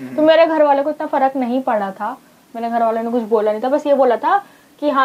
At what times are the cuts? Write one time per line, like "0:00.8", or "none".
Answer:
none